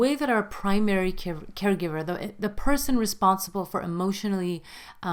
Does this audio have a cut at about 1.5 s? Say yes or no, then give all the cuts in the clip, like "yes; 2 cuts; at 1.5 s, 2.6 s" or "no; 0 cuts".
no; 0 cuts